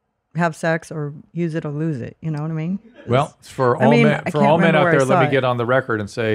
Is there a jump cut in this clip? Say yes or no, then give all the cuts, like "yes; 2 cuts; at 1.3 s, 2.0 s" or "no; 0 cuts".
yes; 2 cuts; at 1.2 s, 2.9 s